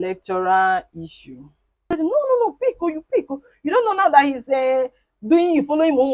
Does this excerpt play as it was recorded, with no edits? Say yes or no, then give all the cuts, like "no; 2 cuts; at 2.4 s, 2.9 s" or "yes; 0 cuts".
no; 1 cut; at 2.0 s